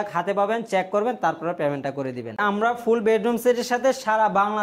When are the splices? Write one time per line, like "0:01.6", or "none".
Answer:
0:02.4